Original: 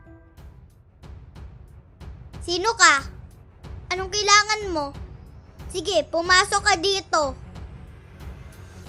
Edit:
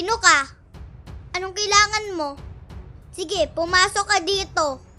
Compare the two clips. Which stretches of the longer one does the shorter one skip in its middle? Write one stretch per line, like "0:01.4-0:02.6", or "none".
none